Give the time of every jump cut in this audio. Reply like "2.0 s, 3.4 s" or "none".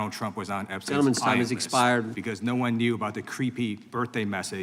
2.2 s